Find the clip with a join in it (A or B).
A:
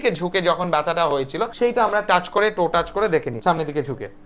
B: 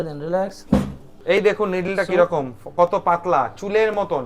B